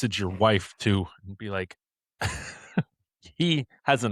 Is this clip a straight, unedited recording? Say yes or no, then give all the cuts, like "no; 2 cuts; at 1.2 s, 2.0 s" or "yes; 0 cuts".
yes; 0 cuts